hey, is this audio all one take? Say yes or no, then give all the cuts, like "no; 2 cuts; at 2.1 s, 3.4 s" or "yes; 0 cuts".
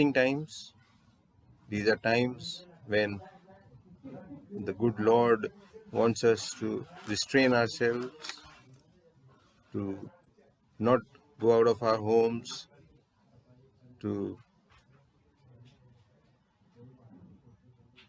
yes; 0 cuts